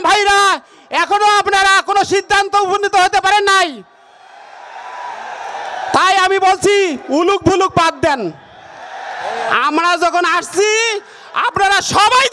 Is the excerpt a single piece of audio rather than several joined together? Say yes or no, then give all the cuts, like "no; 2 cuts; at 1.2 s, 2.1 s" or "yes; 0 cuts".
yes; 0 cuts